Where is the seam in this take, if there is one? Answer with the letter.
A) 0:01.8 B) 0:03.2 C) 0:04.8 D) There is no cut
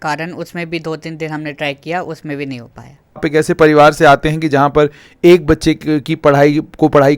B